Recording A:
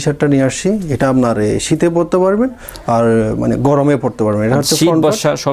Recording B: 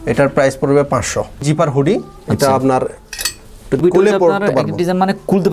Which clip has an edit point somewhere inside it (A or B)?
B